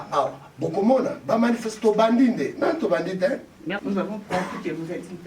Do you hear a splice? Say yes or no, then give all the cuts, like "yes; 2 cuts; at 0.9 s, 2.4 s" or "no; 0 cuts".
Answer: yes; 1 cut; at 3.8 s